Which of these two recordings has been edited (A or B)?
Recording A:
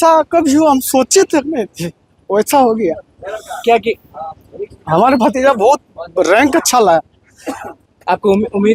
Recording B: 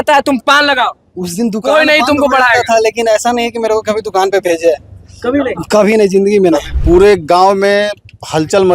B